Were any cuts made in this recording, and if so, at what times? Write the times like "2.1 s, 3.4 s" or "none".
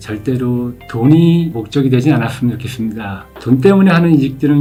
none